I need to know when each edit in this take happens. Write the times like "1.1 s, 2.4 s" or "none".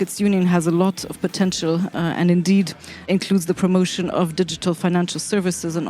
3.1 s